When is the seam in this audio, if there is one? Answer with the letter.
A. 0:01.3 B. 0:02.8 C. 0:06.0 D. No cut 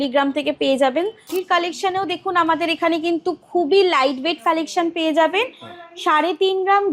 A